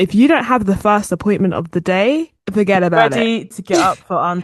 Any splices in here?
yes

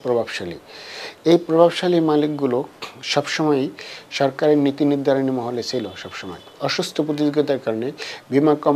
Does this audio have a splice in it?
yes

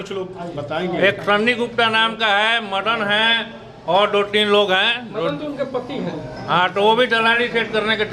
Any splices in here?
no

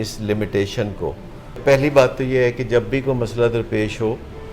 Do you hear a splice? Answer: yes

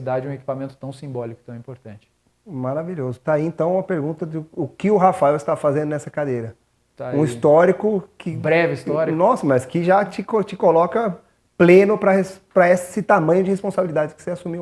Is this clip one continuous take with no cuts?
yes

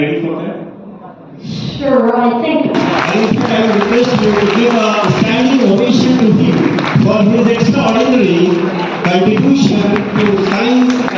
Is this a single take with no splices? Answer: no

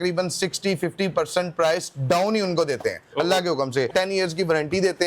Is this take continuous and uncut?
no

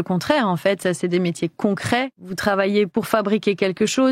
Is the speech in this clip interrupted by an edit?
yes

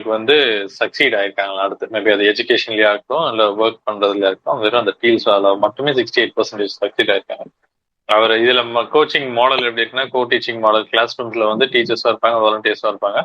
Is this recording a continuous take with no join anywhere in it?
yes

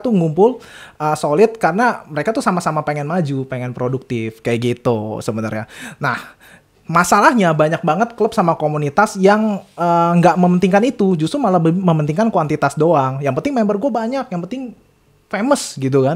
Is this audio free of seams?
yes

